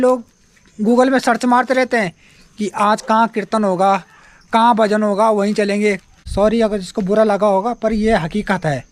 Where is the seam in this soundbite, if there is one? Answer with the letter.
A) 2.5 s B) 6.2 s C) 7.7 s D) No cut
B